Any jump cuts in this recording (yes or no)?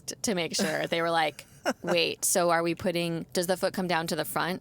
yes